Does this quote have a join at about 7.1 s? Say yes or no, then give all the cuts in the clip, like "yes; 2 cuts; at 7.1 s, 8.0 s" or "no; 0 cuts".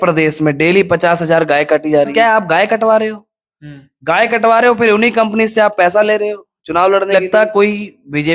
yes; 2 cuts; at 2.1 s, 7.1 s